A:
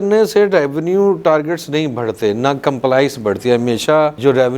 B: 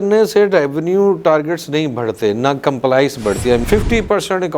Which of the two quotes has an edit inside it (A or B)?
B